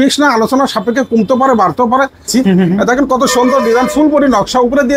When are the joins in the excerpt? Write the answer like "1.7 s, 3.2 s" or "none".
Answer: 2.2 s